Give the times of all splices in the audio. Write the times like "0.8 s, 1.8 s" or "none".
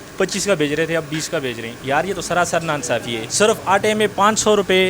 1.7 s, 3.2 s